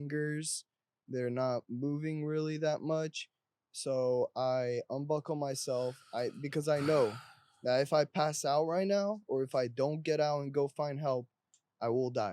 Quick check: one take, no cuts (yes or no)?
yes